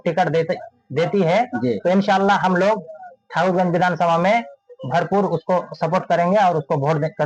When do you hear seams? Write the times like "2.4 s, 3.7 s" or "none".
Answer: none